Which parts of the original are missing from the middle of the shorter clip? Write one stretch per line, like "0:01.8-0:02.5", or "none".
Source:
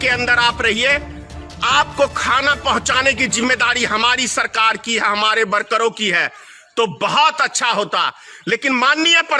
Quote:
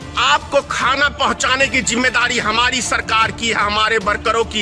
none